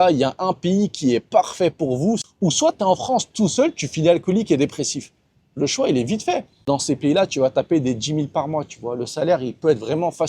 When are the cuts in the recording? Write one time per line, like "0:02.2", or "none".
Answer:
0:02.2
0:06.7